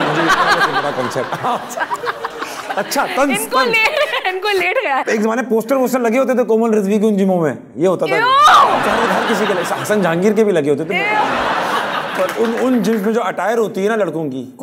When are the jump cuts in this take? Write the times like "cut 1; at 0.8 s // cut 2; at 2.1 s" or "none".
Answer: cut 1; at 5.0 s // cut 2; at 8.8 s // cut 3; at 12.1 s